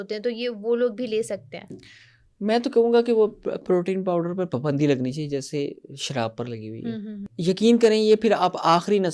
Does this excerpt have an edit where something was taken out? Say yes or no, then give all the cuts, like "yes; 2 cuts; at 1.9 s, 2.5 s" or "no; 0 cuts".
yes; 1 cut; at 7.3 s